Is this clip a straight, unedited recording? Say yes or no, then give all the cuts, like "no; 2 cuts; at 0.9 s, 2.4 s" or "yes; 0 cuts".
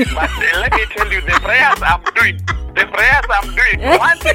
yes; 0 cuts